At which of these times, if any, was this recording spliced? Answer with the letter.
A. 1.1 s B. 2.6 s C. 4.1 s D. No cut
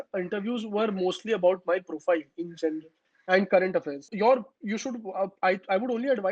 C